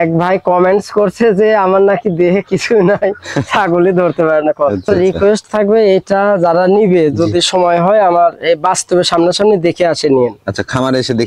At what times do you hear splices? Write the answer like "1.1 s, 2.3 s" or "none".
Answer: 4.9 s